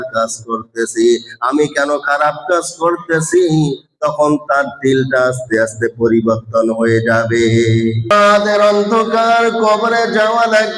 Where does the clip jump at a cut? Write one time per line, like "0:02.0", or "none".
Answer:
0:08.1